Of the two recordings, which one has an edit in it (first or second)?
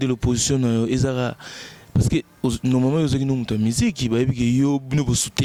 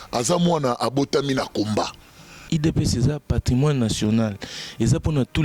second